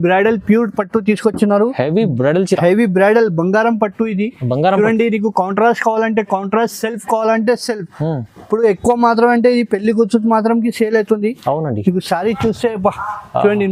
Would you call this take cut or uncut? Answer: uncut